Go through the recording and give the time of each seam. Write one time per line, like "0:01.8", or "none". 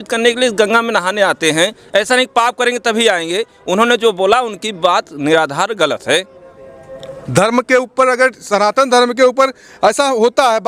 none